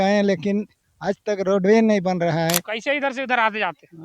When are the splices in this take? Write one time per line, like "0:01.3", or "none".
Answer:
0:02.7